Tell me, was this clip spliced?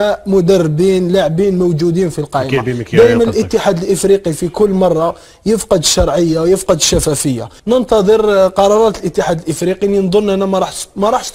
yes; 1 cut; at 7.5 s

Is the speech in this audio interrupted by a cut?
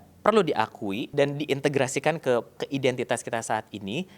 yes; 2 cuts; at 1.0 s, 2.6 s

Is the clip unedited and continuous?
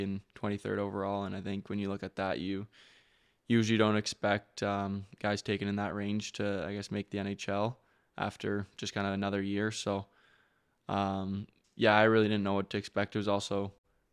yes; 0 cuts

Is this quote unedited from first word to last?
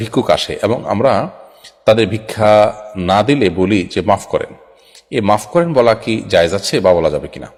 yes; 0 cuts

